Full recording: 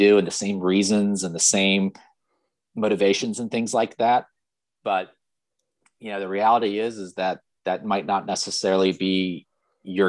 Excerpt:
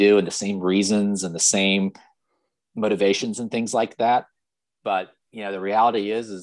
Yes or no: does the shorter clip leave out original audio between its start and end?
yes